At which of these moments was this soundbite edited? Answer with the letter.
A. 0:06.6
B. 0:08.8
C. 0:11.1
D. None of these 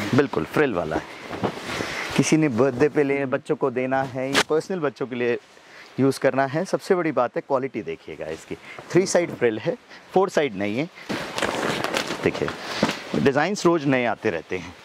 C